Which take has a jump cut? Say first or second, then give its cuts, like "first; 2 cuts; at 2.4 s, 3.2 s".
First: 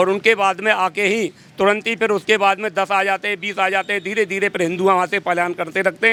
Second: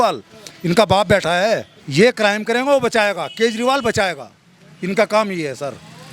second; 1 cut; at 1.8 s